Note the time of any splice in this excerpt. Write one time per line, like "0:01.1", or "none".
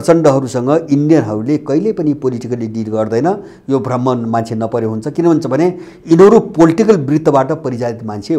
none